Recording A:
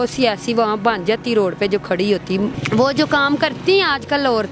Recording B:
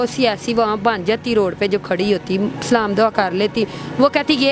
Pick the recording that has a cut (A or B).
A